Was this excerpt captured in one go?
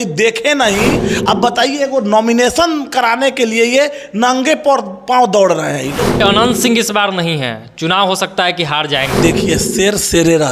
no; 3 cuts; at 1.1 s, 6.2 s, 9.1 s

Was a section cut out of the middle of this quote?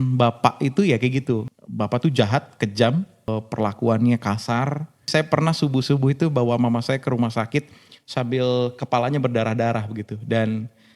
yes; 3 cuts; at 1.5 s, 3.3 s, 5.1 s

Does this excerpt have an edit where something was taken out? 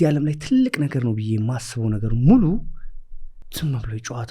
no; 0 cuts

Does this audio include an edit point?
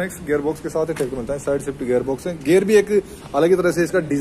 no; 0 cuts

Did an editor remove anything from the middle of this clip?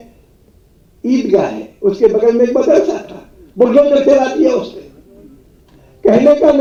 no; 0 cuts

